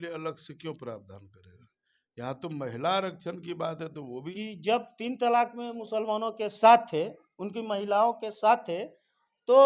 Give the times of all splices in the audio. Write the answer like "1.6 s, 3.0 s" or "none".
4.2 s